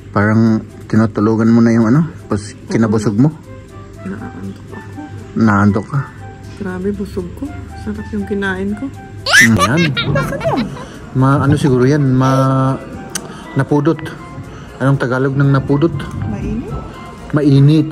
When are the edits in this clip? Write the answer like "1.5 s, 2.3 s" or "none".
9.6 s